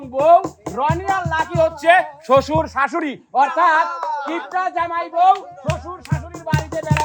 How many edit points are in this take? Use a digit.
0